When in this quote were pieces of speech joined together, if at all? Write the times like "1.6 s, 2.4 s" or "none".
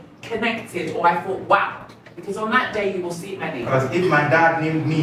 3.6 s